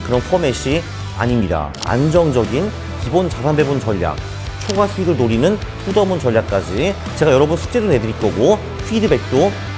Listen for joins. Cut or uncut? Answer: cut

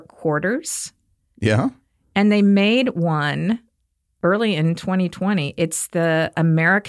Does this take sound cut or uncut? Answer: uncut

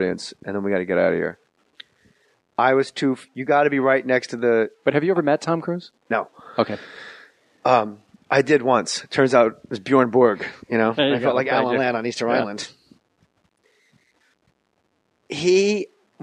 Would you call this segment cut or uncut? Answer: uncut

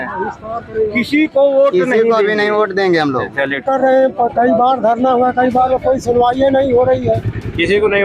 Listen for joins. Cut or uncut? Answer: cut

